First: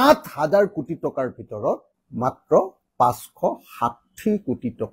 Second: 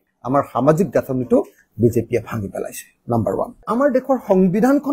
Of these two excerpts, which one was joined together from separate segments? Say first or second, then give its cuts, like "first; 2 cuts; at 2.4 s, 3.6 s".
second; 1 cut; at 3.7 s